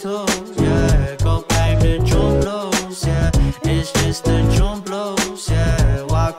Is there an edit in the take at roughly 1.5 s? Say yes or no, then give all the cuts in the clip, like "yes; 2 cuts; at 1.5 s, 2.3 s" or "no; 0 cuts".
yes; 1 cut; at 1.5 s